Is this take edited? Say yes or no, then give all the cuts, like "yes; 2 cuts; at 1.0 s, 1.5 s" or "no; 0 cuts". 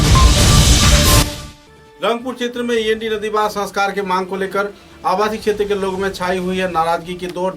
yes; 1 cut; at 1.2 s